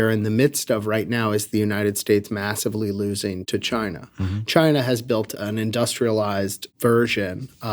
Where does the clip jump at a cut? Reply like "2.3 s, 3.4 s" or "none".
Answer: 3.4 s, 5.3 s, 6.6 s